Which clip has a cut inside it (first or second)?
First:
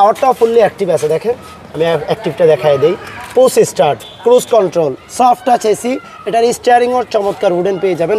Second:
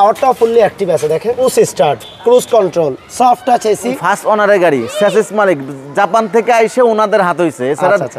second